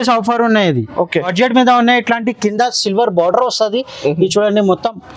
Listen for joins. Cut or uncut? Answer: cut